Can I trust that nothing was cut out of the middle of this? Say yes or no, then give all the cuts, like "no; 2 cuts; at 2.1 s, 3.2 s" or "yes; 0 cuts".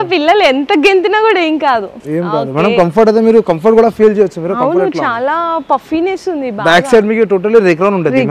no; 1 cut; at 2.0 s